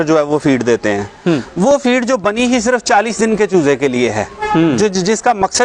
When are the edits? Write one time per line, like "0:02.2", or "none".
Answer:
none